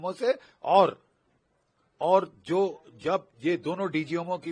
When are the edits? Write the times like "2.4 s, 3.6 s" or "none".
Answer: none